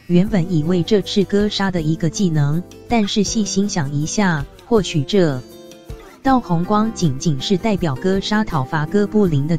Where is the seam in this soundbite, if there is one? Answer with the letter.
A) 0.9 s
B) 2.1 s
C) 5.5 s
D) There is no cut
D